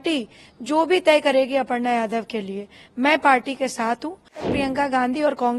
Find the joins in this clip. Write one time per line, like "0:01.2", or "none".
0:04.5